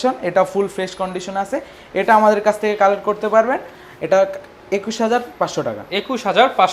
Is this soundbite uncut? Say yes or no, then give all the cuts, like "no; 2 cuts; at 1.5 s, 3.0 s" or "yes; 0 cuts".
yes; 0 cuts